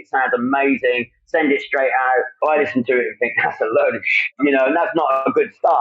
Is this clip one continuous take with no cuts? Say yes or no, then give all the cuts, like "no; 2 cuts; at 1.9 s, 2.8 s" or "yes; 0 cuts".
no; 1 cut; at 4.2 s